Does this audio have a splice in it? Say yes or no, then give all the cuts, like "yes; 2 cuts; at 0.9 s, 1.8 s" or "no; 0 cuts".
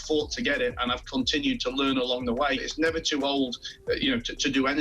yes; 1 cut; at 2.7 s